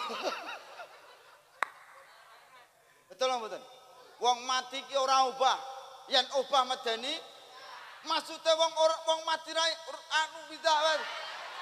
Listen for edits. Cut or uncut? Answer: cut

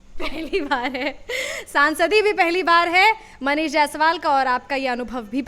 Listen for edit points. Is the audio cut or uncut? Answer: uncut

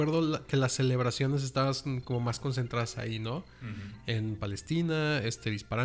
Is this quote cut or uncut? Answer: uncut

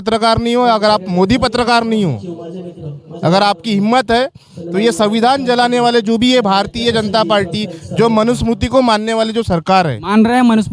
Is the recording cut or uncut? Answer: uncut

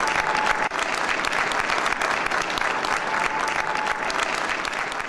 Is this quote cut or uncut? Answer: uncut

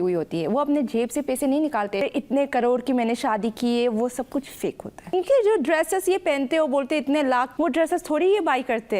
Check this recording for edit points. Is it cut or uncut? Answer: cut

